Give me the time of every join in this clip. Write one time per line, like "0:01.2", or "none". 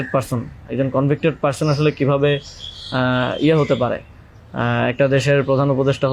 none